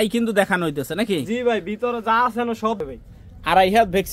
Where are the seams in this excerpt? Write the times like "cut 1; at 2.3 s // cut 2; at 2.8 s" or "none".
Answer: cut 1; at 2.8 s

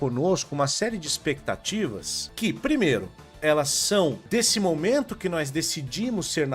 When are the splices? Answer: cut 1; at 2.2 s // cut 2; at 4.2 s

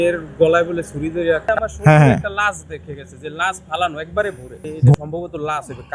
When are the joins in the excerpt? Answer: cut 1; at 1.5 s // cut 2; at 4.9 s

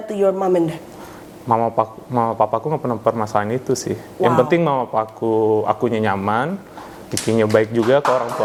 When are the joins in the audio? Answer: none

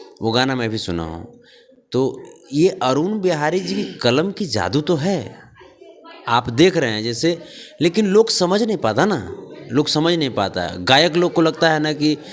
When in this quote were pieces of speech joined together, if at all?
none

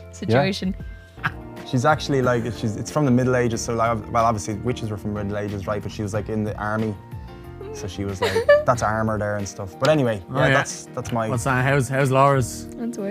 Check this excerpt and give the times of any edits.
cut 1; at 1.2 s

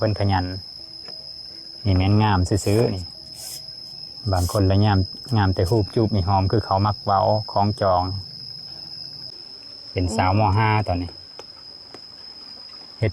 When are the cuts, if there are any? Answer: cut 1; at 9.3 s

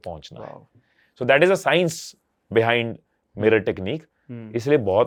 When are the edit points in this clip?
none

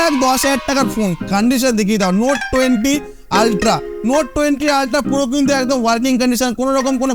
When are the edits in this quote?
none

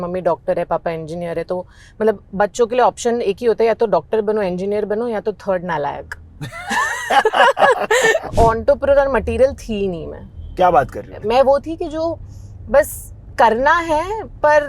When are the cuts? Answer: cut 1; at 8.3 s // cut 2; at 11.1 s

